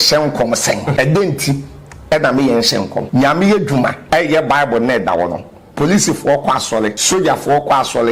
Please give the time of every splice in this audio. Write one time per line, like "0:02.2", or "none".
0:00.9
0:03.0
0:04.0
0:07.0

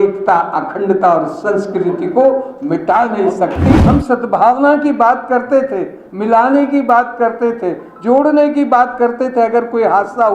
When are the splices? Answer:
0:03.7

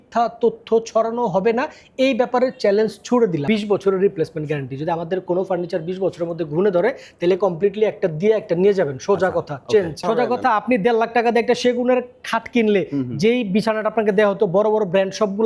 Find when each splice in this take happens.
0:03.4
0:10.0

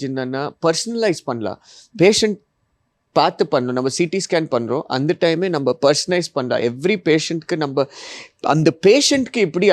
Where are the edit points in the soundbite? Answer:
none

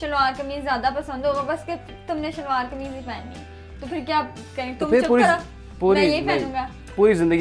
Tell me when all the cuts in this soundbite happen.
none

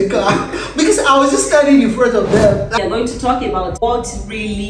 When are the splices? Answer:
0:02.7
0:03.8

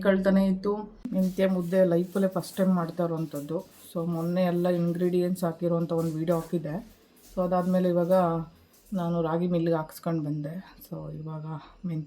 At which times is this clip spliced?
0:00.9

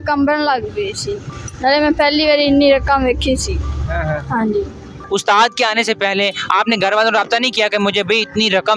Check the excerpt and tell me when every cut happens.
none

